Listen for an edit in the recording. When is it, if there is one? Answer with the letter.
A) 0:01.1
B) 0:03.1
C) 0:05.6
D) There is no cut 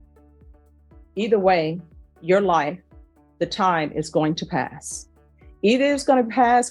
A